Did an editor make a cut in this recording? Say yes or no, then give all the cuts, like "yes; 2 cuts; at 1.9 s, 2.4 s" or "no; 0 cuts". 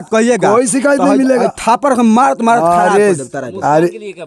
no; 0 cuts